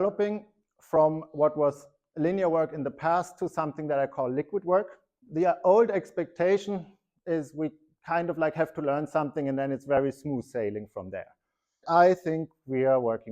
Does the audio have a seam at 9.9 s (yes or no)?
no